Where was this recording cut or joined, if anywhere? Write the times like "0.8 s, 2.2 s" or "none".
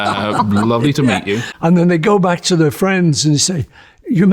1.5 s